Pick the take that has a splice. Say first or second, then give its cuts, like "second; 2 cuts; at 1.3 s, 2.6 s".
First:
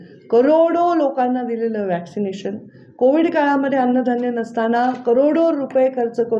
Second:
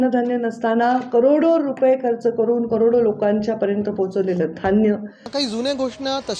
second; 1 cut; at 5.3 s